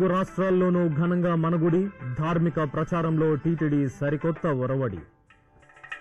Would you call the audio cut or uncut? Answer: uncut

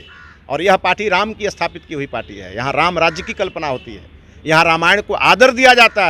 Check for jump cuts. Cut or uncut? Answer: uncut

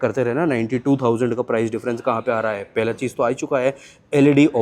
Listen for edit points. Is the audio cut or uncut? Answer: uncut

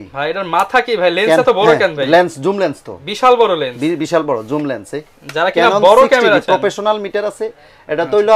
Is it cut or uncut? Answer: uncut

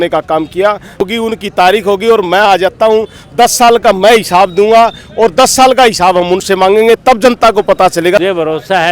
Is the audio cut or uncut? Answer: cut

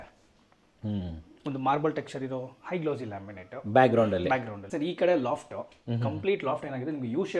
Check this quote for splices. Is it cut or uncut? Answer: cut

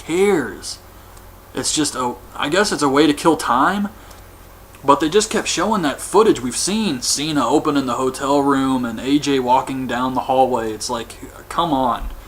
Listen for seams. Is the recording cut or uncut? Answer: uncut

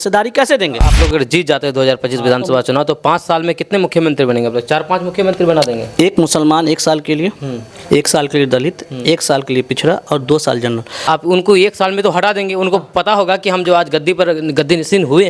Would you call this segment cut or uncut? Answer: cut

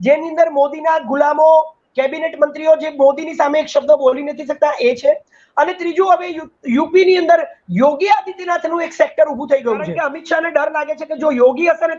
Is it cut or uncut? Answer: cut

